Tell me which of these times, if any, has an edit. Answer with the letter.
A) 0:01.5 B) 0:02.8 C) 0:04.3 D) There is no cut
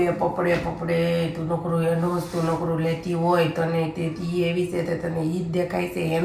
D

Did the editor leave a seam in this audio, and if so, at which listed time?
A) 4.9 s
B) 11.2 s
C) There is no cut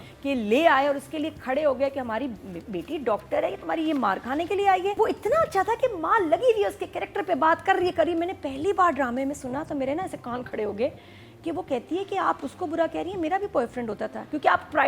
A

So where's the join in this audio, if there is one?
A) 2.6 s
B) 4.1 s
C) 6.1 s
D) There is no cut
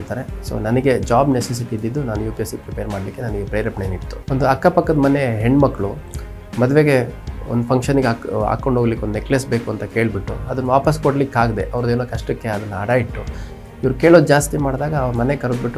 B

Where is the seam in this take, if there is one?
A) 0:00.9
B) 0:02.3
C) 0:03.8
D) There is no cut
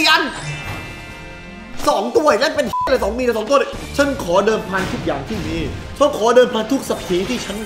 C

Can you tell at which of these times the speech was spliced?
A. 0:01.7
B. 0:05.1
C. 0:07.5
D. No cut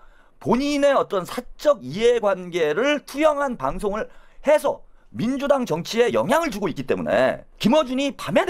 C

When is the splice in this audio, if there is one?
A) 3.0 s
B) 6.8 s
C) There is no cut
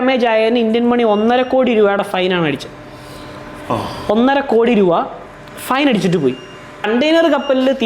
B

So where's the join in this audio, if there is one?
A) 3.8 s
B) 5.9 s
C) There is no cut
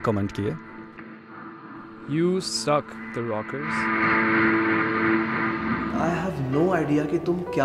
B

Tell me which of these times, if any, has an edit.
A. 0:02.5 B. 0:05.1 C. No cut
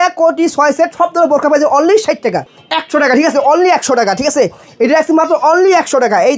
A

